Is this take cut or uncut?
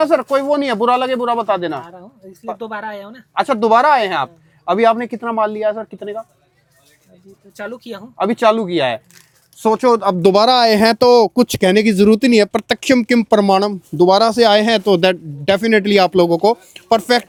uncut